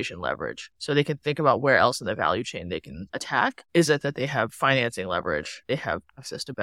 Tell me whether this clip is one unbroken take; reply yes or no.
no